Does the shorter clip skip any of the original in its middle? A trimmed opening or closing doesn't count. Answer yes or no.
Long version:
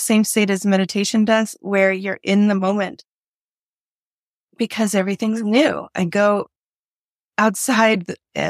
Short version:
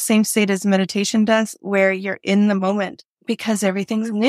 yes